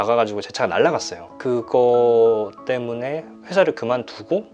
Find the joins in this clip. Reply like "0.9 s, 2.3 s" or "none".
1.3 s